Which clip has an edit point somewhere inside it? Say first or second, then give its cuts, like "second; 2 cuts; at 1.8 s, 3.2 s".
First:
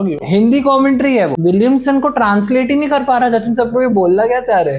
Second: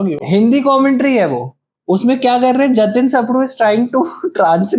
first; 1 cut; at 1.3 s